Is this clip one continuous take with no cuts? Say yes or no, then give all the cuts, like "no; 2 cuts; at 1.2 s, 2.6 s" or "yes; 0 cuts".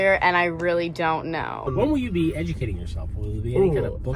no; 1 cut; at 1.7 s